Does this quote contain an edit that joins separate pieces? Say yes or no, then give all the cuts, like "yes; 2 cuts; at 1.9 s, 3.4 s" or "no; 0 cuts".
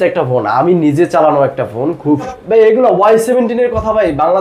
yes; 1 cut; at 2.3 s